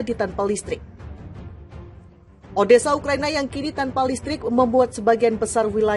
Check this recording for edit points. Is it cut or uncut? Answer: uncut